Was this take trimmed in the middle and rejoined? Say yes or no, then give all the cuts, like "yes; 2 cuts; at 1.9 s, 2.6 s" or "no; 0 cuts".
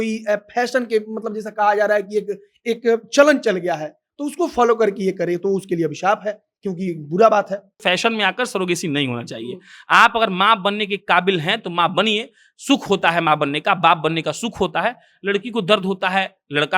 yes; 1 cut; at 7.8 s